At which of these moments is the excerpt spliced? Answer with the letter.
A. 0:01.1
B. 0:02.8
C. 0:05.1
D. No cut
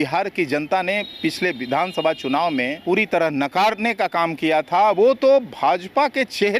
B